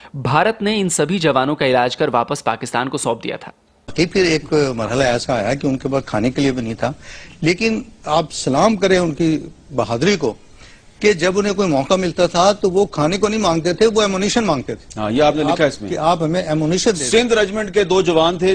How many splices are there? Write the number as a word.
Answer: one